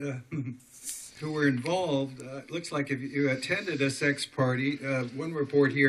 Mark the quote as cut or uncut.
uncut